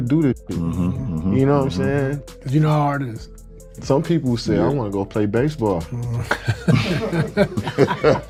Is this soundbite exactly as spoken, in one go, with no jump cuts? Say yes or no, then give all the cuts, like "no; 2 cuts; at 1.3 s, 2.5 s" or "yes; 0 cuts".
yes; 0 cuts